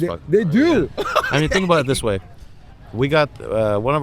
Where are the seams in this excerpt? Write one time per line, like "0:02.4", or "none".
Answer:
none